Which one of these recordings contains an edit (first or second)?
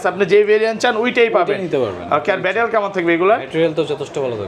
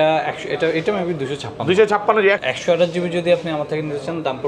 second